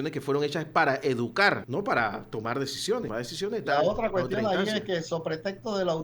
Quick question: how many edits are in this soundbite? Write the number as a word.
two